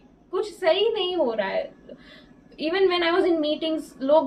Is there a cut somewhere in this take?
no; 0 cuts

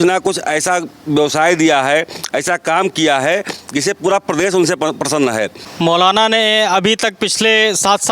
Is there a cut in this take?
yes; 1 cut; at 5.6 s

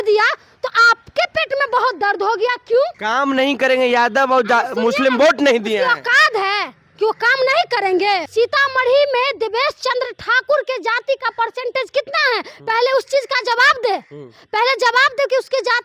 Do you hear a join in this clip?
yes; 2 cuts; at 3.0 s, 8.3 s

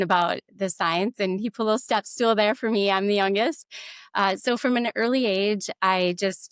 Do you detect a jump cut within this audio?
no; 0 cuts

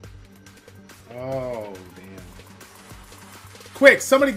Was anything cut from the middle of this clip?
yes; 1 cut; at 2.7 s

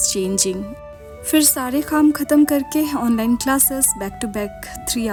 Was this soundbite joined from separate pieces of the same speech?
no; 0 cuts

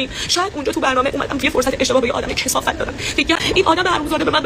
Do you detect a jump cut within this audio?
yes; 1 cut; at 3.4 s

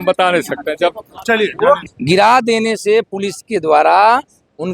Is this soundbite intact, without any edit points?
no; 1 cut; at 1.8 s

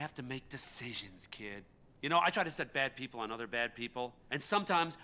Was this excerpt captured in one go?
no; 1 cut; at 2.8 s

